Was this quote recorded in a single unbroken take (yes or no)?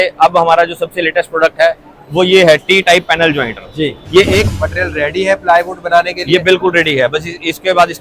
no